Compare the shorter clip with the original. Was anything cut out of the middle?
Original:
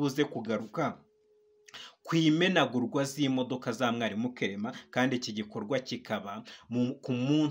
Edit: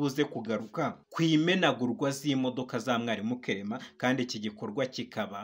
yes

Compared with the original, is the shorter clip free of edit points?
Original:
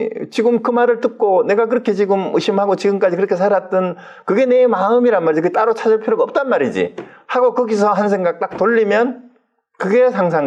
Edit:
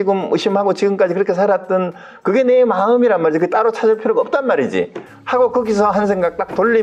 yes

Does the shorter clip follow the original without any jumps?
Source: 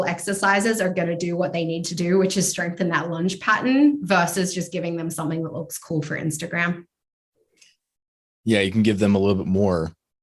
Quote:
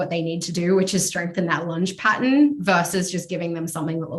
yes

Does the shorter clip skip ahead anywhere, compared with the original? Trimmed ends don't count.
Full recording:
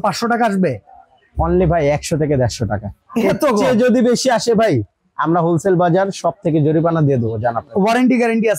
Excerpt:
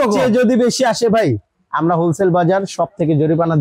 no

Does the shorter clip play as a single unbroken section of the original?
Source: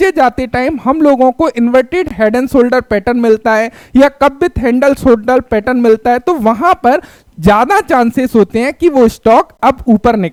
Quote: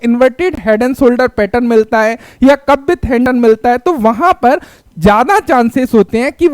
no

